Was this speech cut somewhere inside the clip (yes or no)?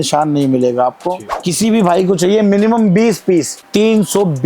yes